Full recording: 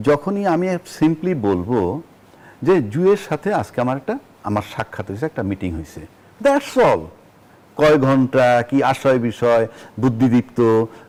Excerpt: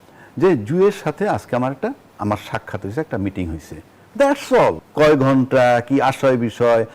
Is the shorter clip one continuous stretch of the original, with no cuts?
no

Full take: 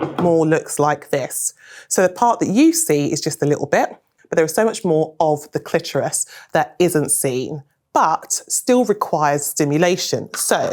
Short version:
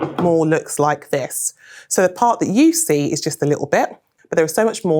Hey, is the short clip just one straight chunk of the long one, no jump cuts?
yes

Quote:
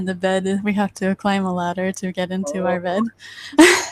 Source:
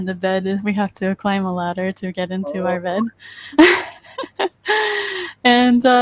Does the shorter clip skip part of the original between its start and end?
no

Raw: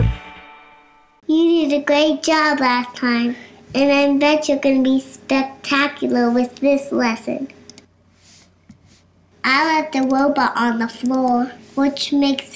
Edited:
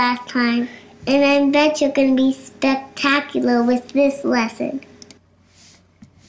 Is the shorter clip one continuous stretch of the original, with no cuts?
yes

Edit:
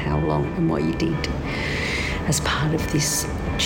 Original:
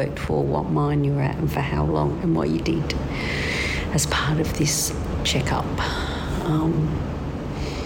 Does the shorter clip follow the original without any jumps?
yes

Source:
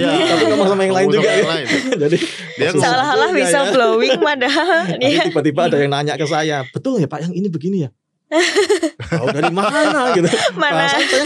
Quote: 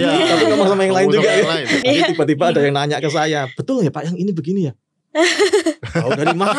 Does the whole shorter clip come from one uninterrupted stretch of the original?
no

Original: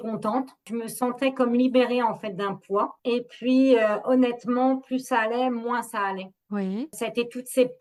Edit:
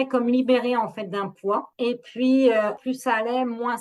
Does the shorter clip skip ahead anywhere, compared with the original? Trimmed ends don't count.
yes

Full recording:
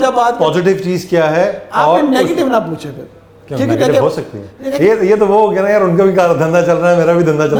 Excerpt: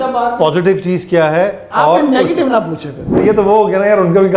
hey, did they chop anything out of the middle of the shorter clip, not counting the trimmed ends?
yes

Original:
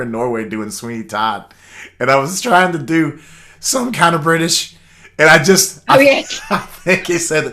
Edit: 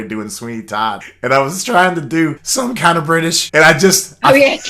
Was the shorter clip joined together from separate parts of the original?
yes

